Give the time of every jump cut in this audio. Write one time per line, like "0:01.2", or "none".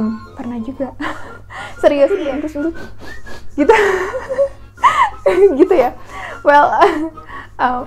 0:02.2